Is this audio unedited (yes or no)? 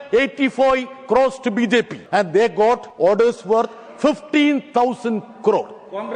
no